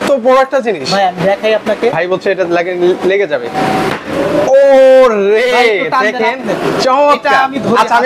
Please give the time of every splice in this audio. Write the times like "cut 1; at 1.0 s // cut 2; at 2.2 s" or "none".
cut 1; at 1.9 s